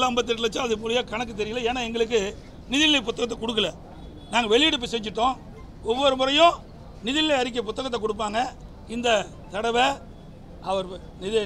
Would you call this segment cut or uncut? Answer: uncut